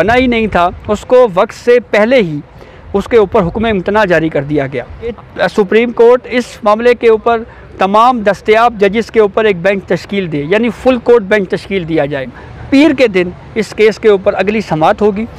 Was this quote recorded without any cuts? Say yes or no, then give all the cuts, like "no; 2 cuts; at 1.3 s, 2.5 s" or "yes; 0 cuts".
no; 2 cuts; at 5.1 s, 12.4 s